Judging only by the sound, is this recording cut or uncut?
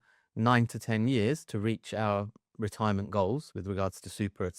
uncut